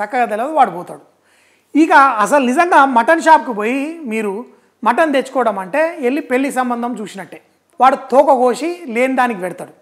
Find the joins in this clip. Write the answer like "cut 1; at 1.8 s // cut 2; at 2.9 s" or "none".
cut 1; at 7.6 s